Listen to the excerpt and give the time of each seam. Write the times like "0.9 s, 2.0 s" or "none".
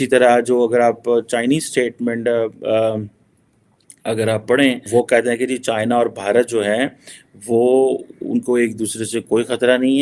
4.8 s